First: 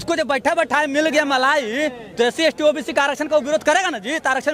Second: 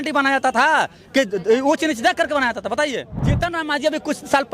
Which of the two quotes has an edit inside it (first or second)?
second